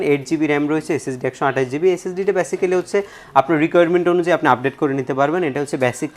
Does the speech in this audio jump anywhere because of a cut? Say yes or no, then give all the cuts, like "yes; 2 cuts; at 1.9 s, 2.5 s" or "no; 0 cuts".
no; 0 cuts